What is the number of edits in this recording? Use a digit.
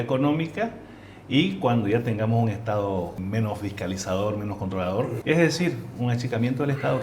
2